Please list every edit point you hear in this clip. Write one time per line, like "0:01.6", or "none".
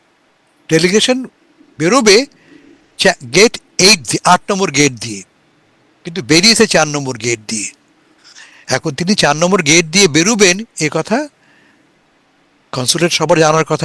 none